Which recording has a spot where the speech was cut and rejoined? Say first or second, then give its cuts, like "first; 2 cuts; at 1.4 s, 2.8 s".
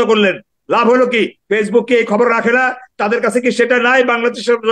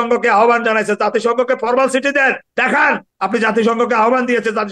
second; 1 cut; at 2.6 s